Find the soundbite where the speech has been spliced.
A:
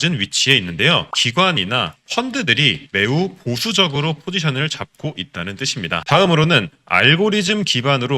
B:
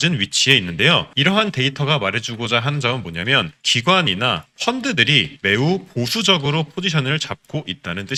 A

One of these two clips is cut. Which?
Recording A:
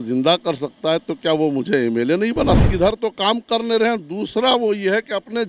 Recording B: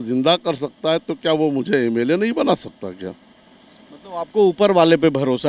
A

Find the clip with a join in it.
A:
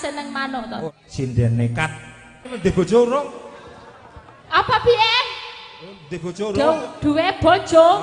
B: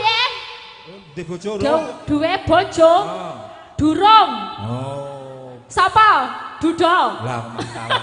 A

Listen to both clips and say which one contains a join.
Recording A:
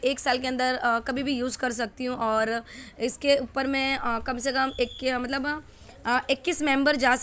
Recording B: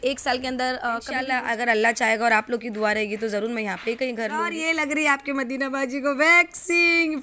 B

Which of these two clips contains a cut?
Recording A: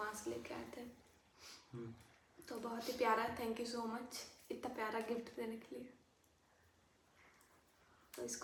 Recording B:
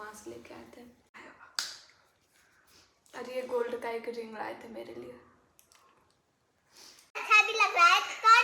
B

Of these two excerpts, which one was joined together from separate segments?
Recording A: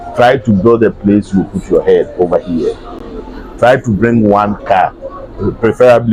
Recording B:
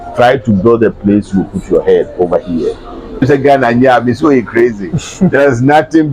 B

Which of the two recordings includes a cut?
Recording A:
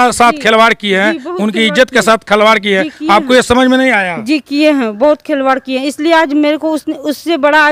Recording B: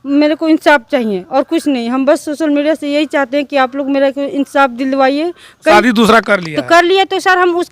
B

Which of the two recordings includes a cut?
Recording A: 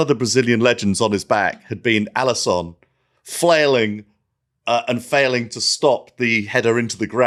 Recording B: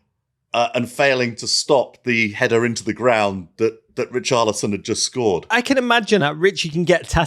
B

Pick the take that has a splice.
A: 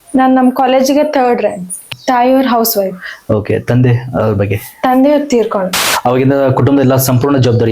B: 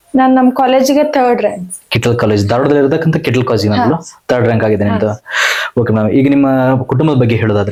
A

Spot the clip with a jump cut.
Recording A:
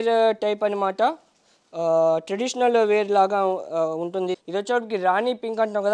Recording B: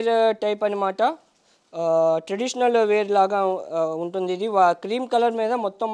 A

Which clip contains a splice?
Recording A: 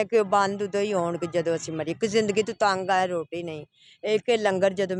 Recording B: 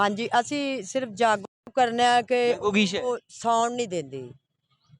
B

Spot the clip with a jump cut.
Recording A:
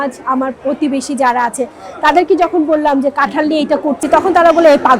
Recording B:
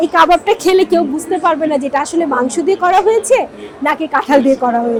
A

